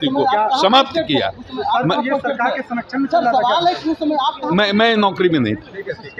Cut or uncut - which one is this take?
uncut